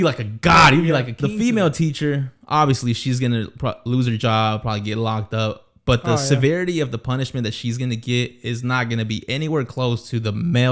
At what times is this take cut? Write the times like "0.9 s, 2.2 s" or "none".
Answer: 1.2 s